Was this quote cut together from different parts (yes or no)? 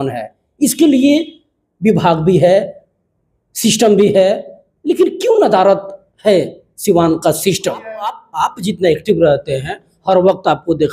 yes